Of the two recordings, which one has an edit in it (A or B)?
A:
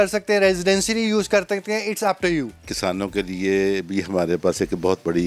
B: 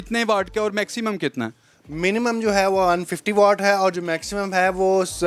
A